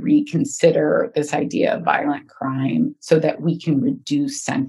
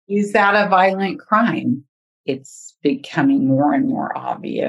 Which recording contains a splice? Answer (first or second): second